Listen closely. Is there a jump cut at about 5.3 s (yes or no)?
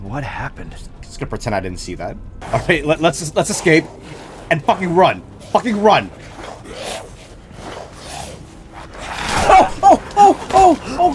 no